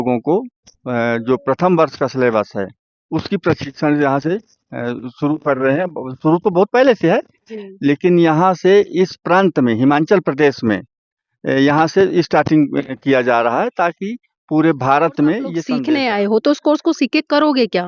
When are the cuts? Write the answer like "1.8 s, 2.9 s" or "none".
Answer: 15.7 s